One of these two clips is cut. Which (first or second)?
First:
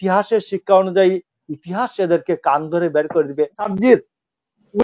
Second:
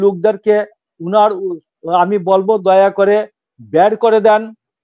first